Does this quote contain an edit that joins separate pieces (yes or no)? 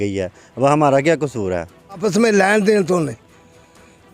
yes